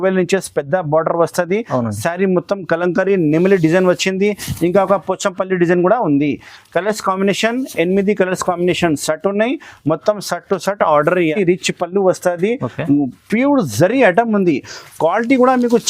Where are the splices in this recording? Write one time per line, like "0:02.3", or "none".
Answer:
0:11.3